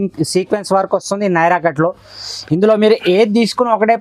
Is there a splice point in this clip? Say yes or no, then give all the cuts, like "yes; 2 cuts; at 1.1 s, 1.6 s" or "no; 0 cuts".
no; 0 cuts